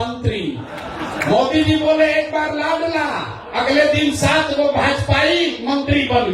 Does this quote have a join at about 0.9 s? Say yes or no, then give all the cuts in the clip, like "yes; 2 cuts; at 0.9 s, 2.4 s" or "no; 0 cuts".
yes; 1 cut; at 0.9 s